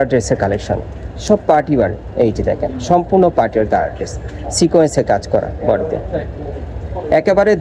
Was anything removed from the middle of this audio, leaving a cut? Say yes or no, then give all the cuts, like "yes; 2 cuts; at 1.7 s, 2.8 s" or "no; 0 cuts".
no; 0 cuts